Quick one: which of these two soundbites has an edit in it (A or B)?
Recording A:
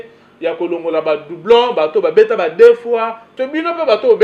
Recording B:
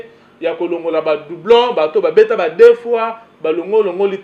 A